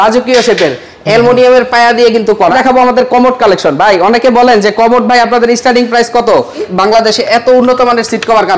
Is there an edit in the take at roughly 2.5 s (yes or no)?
yes